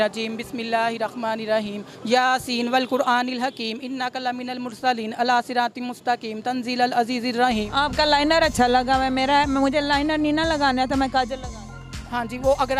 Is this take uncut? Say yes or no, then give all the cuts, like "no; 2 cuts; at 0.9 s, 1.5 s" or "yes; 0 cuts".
no; 1 cut; at 7.7 s